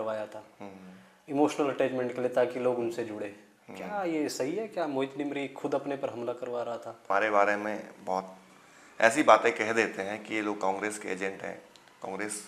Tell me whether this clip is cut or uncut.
cut